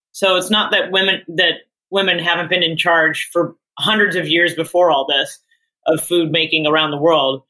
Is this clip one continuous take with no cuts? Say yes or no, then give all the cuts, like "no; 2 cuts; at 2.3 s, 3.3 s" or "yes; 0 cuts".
no; 1 cut; at 1.7 s